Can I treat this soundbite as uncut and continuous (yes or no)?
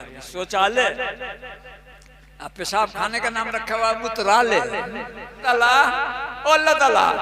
no